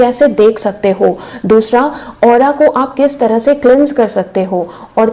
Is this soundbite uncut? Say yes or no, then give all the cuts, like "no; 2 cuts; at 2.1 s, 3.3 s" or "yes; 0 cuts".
yes; 0 cuts